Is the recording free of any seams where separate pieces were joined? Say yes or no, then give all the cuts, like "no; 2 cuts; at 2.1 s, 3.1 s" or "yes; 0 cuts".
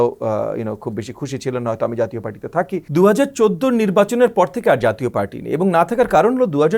no; 1 cut; at 2.8 s